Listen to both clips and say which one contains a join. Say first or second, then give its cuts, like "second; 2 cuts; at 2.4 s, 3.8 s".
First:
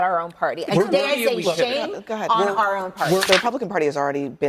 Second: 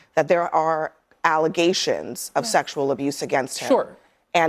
first; 1 cut; at 3.3 s